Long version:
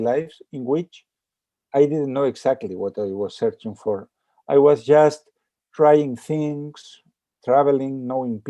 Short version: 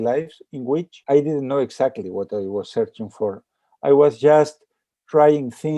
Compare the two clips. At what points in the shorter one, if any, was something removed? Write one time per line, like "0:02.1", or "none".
0:00.9